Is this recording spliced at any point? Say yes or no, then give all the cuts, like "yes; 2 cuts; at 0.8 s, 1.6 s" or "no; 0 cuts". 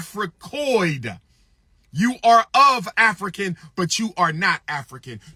no; 0 cuts